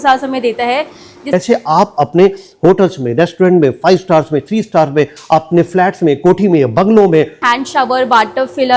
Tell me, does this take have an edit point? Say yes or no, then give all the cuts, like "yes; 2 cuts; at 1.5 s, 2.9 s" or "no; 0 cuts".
yes; 2 cuts; at 1.3 s, 7.4 s